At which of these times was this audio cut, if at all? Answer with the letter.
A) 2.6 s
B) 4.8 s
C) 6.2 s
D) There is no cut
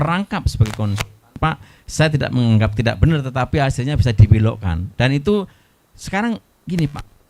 D